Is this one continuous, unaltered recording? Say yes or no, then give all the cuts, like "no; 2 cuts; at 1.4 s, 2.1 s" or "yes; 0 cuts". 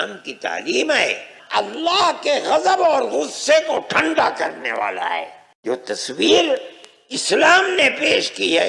no; 2 cuts; at 1.3 s, 5.4 s